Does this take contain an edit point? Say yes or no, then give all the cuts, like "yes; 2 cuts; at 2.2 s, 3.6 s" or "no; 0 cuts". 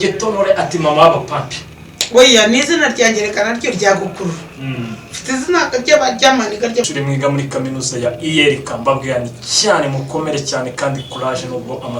yes; 1 cut; at 6.9 s